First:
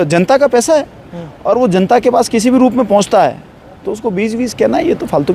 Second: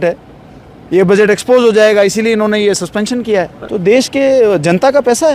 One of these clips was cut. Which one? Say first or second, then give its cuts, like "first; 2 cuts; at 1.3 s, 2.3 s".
second; 1 cut; at 3.6 s